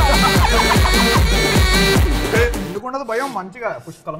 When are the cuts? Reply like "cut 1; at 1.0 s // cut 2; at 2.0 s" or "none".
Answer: none